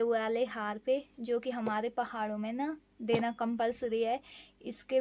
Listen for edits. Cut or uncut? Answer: uncut